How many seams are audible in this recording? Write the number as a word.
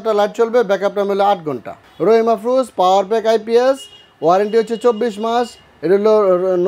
one